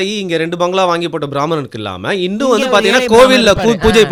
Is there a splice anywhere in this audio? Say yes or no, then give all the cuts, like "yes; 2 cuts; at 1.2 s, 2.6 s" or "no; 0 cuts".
no; 0 cuts